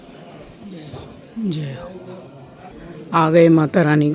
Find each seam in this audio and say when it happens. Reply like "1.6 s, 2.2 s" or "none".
2.7 s